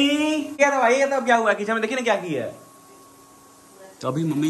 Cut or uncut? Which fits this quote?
uncut